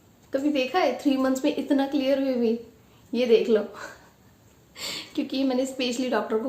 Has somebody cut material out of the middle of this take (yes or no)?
no